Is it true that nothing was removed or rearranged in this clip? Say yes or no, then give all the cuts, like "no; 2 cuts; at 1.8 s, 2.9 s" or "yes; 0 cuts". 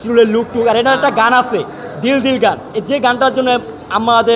yes; 0 cuts